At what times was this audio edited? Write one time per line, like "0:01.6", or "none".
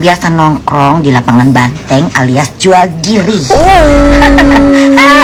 none